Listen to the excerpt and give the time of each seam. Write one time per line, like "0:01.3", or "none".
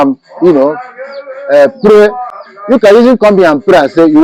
none